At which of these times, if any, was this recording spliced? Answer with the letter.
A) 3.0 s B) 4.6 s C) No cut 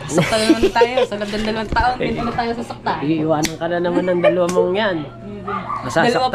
C